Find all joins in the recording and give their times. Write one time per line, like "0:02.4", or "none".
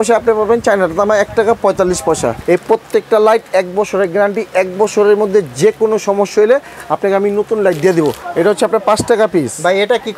0:02.4
0:08.2